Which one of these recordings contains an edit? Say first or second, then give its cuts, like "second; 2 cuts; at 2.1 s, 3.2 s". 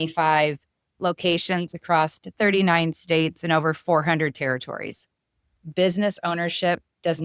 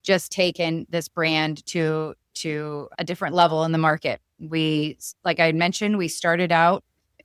first; 1 cut; at 5.8 s